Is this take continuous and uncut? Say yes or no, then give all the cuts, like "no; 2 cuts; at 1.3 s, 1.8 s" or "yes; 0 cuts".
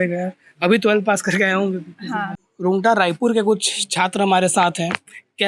no; 1 cut; at 2.3 s